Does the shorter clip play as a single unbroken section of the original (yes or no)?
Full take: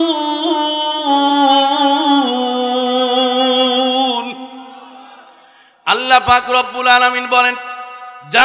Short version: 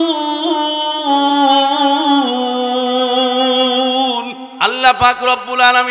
no